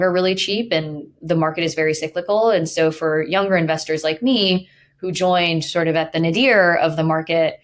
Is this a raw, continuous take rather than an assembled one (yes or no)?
no